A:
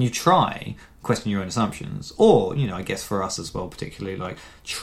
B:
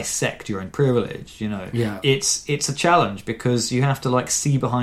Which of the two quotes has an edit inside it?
B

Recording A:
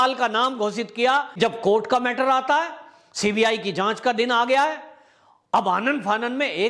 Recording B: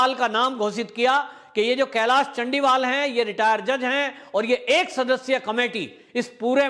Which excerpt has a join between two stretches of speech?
A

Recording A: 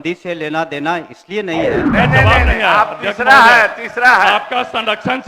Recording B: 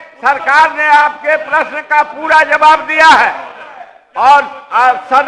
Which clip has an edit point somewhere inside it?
A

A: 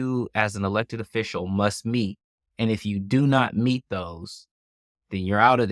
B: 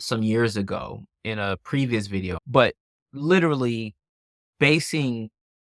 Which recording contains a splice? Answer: B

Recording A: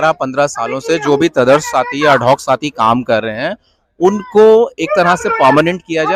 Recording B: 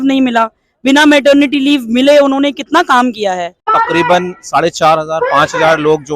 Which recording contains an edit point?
B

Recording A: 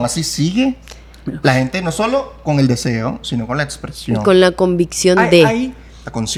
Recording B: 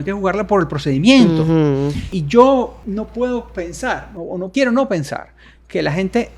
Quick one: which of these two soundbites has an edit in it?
B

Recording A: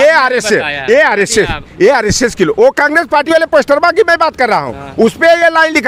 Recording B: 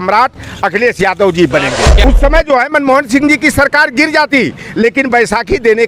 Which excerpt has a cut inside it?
B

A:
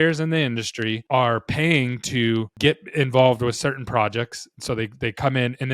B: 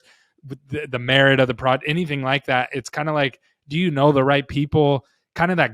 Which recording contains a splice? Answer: A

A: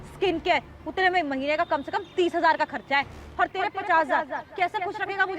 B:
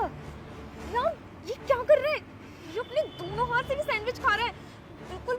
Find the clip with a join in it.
A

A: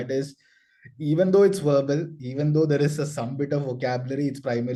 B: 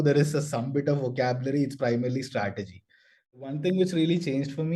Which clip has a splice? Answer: B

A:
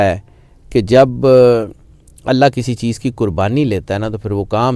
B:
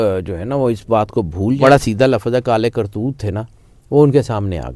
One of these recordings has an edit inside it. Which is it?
B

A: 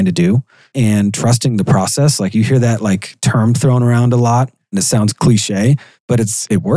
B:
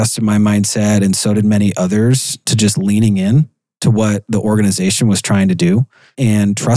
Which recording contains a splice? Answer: A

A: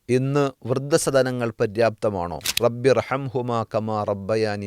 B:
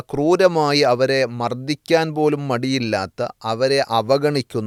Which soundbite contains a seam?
A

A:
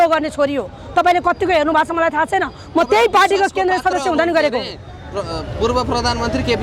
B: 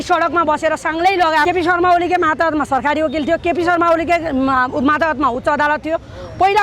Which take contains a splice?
B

